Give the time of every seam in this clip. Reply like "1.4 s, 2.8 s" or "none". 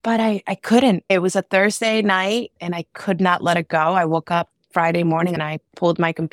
1.1 s, 2.5 s, 4.6 s, 5.4 s

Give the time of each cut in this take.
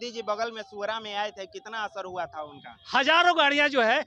2.7 s

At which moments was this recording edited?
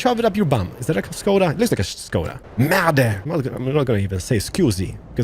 2.4 s, 3.2 s

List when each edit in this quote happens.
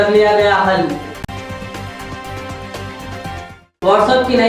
none

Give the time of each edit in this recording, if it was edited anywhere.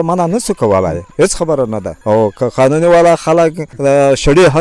1.0 s, 1.9 s, 3.7 s

